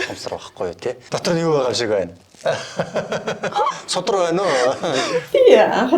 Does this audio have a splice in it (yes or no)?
yes